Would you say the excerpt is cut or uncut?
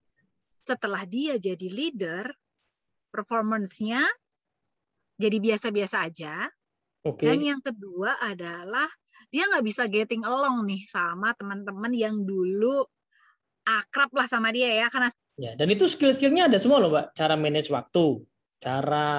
cut